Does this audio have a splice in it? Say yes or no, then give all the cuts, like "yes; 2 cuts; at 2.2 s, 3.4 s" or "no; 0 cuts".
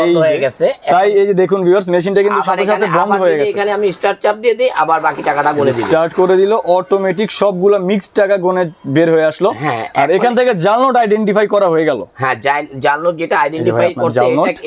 no; 0 cuts